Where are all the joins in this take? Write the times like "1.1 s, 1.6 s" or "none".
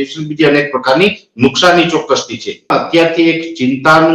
2.7 s